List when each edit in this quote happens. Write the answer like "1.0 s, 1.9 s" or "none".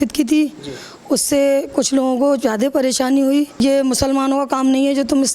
3.5 s